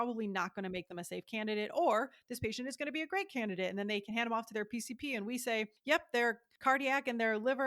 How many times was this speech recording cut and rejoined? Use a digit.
2